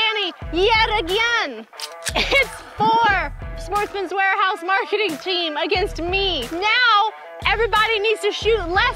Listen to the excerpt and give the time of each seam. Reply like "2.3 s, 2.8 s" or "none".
2.2 s, 6.4 s